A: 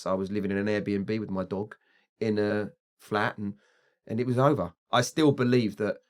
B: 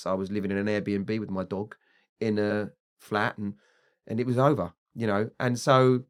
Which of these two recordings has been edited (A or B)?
A